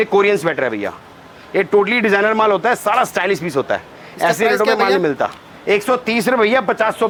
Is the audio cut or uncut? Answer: uncut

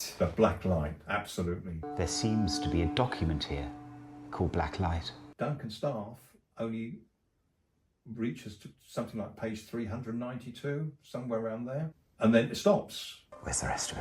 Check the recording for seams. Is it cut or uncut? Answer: cut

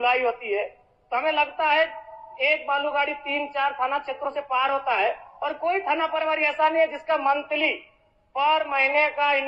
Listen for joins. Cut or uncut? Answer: uncut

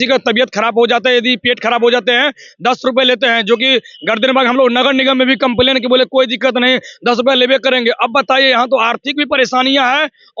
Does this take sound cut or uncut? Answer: uncut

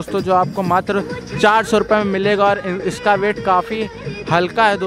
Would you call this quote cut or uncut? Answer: uncut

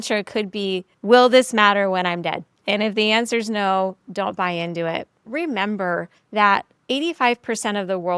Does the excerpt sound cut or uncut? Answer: cut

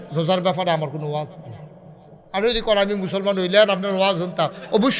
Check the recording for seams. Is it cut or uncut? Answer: uncut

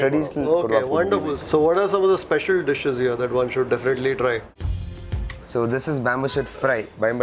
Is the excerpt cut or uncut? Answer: cut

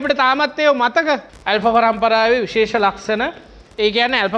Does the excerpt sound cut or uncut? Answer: cut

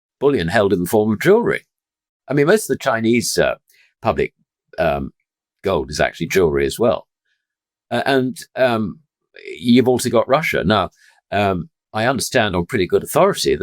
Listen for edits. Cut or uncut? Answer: cut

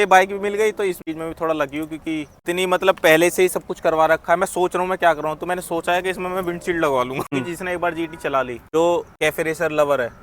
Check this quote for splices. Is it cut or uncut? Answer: cut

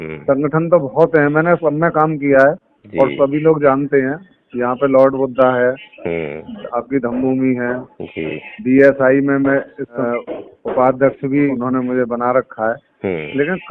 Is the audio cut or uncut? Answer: cut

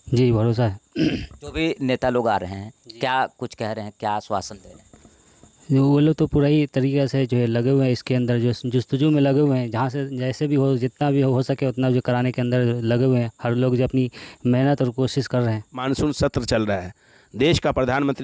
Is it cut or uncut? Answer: cut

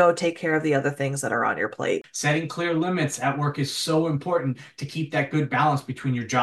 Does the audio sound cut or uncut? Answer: cut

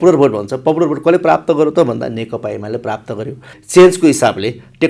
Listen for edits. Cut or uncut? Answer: cut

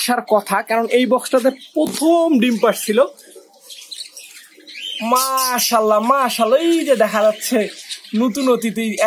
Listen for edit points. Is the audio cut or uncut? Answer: uncut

